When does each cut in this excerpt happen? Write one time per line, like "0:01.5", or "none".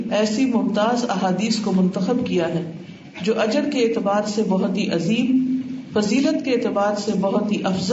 none

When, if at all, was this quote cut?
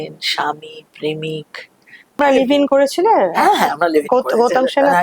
0:02.2

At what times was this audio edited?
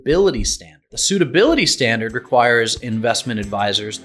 0:01.0

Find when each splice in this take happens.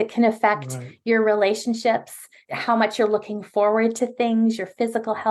0:02.3

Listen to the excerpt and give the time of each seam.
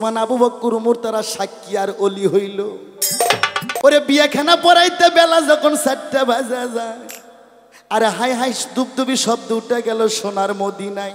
0:03.8

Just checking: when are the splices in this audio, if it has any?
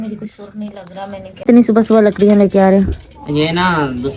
0:01.4

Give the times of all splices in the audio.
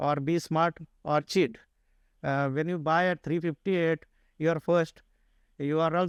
none

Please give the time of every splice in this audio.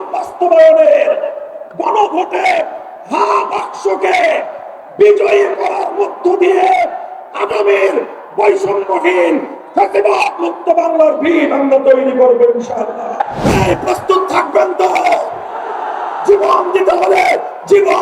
0:13.3

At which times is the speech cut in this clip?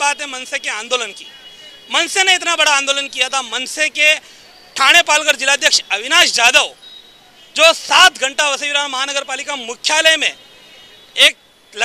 none

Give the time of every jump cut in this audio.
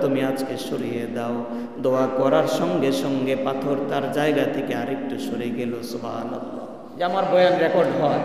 0:06.8

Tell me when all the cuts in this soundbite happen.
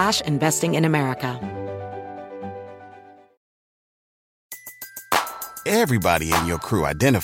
0:01.4

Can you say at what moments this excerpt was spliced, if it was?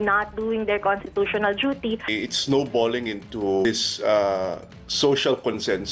0:02.0
0:03.6

